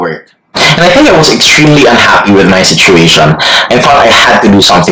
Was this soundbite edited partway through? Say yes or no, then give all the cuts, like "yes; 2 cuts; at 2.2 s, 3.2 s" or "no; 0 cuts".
no; 0 cuts